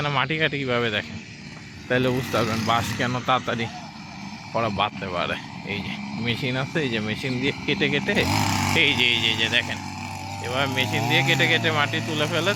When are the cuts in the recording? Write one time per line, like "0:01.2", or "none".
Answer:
none

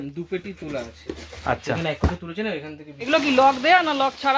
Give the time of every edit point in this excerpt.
0:03.1

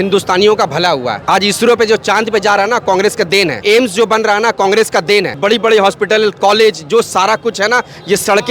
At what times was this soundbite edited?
0:01.2
0:03.6
0:05.4

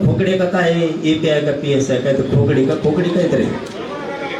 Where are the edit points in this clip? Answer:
none

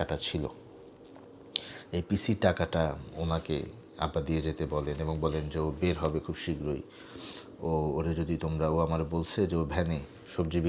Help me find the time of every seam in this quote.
none

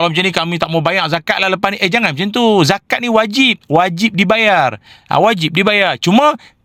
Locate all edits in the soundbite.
none

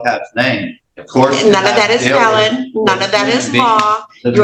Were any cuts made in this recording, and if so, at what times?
none

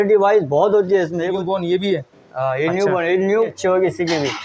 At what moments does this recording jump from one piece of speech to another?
0:01.4
0:03.6

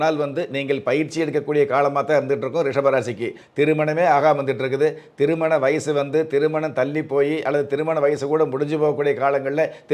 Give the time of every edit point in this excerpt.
0:03.4

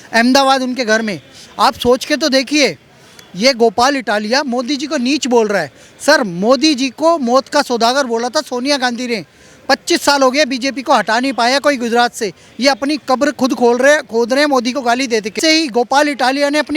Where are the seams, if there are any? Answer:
0:15.4

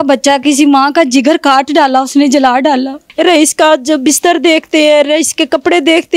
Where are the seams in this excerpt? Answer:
0:03.0

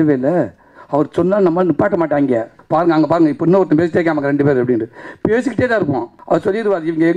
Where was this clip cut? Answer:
0:02.5
0:06.1

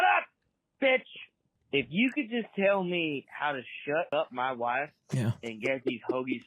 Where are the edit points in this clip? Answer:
0:01.6
0:04.1

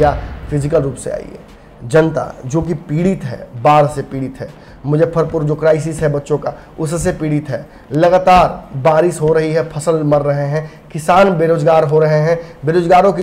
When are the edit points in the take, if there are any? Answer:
none

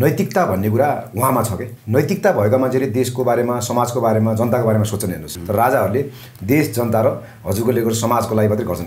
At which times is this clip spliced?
0:01.7
0:05.3

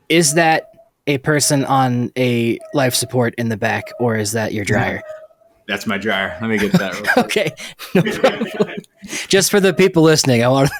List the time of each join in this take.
none

